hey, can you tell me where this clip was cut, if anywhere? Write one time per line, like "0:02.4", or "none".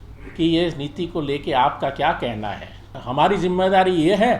0:03.0